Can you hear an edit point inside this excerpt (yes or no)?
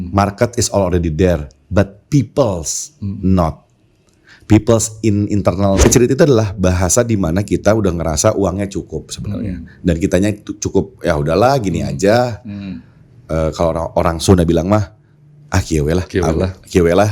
yes